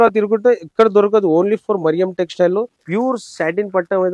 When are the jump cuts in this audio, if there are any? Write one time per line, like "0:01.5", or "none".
0:02.8